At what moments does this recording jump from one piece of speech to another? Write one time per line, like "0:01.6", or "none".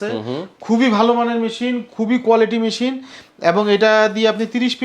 none